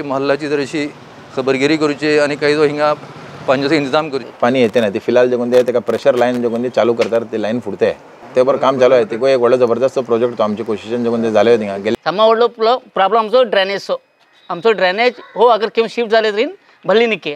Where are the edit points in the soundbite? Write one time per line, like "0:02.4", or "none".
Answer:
0:04.2
0:11.9

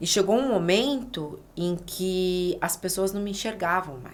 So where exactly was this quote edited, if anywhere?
none

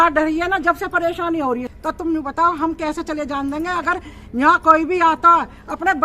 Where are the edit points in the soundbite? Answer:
0:01.7

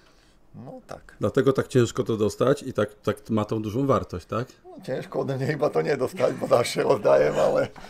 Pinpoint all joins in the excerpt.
none

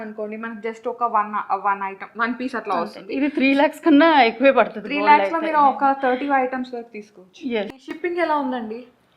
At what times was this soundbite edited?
0:07.7

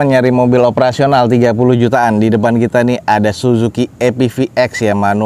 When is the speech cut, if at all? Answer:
none

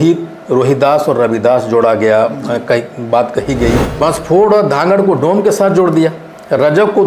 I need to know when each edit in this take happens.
0:03.9

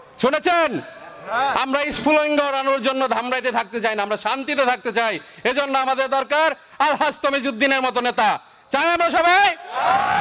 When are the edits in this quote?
none

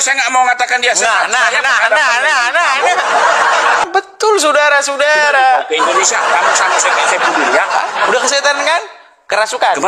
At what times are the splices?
0:03.8

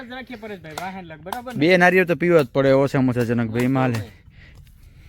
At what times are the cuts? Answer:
none

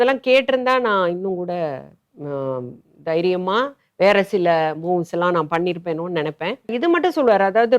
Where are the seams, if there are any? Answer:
0:06.7

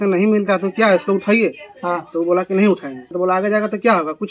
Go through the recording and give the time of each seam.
0:03.1

